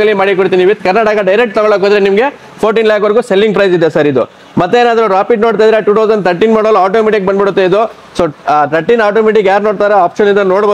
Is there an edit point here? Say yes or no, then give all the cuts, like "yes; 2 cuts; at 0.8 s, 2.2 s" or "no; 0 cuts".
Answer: no; 0 cuts